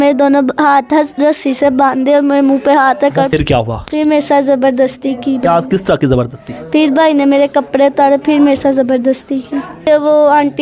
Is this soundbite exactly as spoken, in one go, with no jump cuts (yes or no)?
no